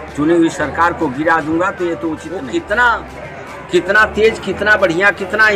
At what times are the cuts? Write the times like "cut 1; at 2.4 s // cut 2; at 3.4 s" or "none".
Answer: cut 1; at 2.3 s